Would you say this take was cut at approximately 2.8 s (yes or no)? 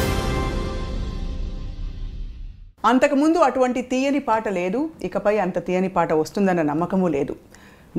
no